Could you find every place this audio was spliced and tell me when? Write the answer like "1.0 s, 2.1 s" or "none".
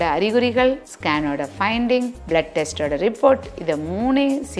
none